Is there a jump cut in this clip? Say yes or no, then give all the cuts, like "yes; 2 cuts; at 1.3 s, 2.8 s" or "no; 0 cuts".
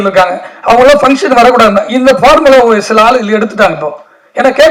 no; 0 cuts